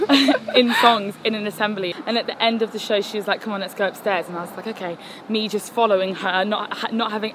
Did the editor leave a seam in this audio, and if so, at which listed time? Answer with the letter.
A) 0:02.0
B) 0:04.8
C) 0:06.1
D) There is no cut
A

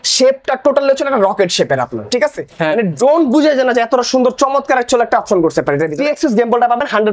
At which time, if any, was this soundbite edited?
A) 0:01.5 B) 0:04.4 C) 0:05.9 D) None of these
C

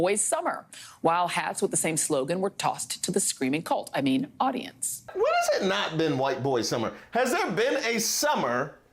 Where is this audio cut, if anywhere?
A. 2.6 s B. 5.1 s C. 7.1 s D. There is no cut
B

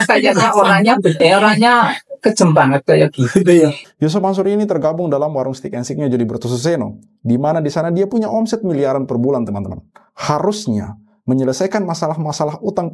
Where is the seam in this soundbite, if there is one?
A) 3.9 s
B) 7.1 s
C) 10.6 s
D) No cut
A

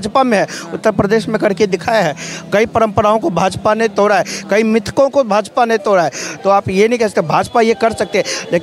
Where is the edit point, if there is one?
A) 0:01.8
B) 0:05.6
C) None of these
C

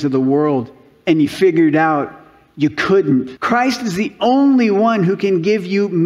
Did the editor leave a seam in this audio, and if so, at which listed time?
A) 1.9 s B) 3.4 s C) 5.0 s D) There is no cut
B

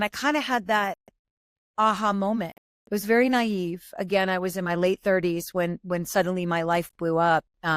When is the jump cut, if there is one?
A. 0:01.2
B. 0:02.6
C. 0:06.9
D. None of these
B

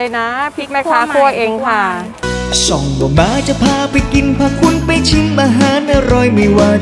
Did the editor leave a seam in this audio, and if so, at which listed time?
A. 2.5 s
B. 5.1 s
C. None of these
A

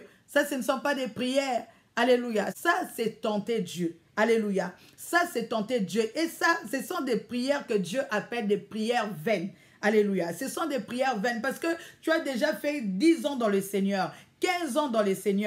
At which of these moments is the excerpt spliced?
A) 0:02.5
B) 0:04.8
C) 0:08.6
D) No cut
A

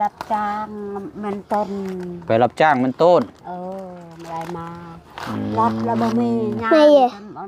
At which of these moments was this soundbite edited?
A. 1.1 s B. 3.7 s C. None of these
C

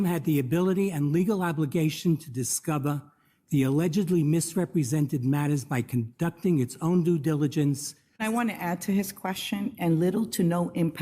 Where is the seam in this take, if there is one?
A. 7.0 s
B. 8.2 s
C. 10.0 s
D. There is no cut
B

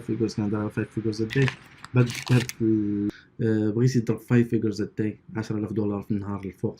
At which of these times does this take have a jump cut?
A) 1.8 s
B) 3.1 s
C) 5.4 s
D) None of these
B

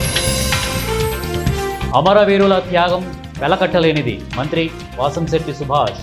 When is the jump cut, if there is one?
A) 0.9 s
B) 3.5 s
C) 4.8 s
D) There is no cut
D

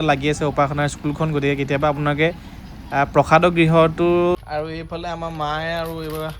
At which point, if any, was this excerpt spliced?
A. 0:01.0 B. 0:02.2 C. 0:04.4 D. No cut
C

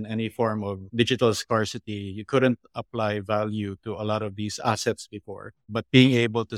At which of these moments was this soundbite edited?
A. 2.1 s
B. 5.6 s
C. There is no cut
B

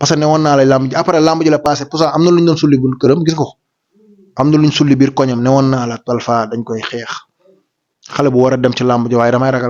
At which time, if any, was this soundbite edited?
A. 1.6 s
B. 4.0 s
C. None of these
C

